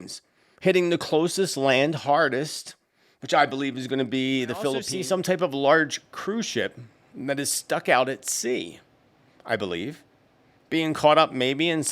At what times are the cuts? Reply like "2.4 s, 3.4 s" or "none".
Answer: 4.9 s